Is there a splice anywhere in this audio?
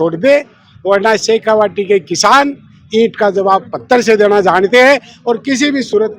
no; 0 cuts

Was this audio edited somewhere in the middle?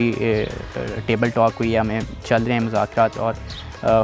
no; 0 cuts

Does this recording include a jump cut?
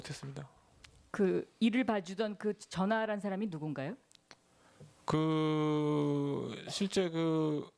yes; 1 cut; at 1.3 s

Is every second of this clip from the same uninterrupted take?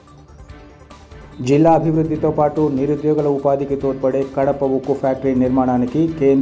no; 1 cut; at 1.2 s

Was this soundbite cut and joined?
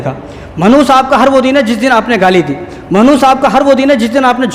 no; 0 cuts

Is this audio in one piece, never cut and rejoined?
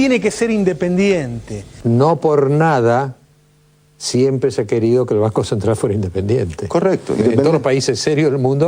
yes; 0 cuts

